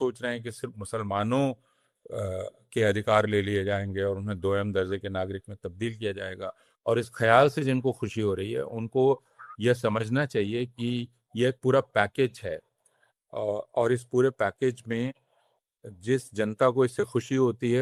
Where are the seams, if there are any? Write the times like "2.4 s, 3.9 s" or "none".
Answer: none